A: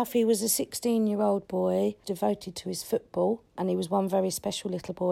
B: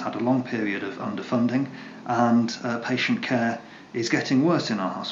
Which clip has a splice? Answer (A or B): A